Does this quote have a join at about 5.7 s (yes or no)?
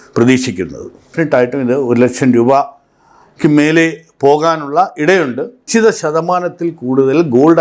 yes